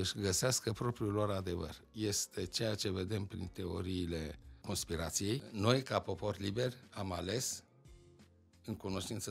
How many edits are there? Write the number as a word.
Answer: two